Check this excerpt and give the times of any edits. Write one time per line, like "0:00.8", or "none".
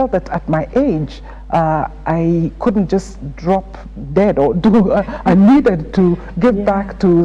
none